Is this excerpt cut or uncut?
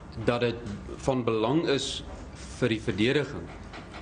uncut